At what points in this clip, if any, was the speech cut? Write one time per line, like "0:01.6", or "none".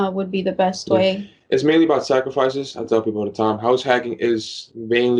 none

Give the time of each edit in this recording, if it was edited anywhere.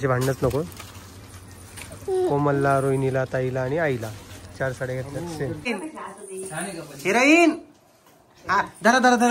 0:05.6

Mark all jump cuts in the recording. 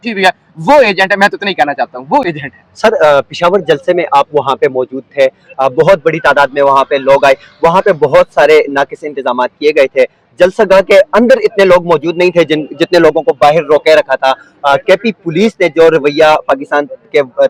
none

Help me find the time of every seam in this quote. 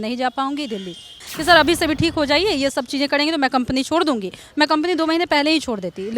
0:01.2

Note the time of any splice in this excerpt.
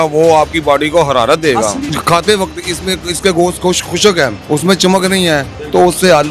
0:01.9
0:04.4

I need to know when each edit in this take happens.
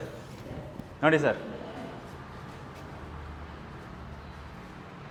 none

